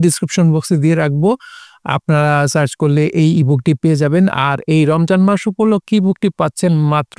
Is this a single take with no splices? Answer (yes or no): yes